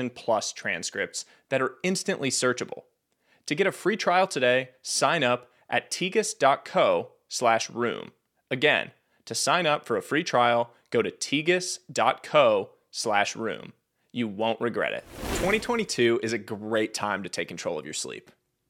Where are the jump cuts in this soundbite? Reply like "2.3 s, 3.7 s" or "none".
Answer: 15.4 s

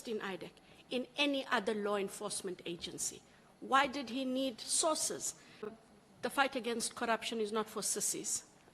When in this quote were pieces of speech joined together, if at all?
5.7 s

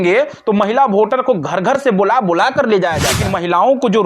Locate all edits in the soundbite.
3.1 s

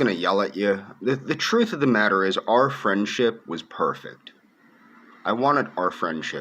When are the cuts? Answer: 1.6 s

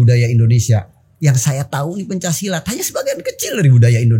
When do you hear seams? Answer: none

